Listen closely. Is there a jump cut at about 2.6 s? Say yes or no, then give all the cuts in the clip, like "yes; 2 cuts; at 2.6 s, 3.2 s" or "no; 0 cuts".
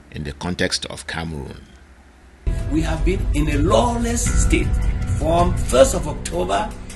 yes; 1 cut; at 2.6 s